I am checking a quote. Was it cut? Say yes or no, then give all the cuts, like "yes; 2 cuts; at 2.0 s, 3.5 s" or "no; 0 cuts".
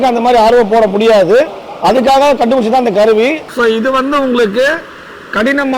yes; 1 cut; at 3.5 s